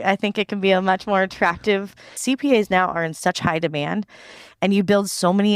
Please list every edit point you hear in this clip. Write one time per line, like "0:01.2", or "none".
0:02.2